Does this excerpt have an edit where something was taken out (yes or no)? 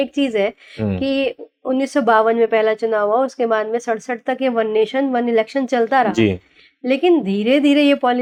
no